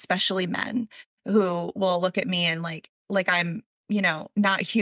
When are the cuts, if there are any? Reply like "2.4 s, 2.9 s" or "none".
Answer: none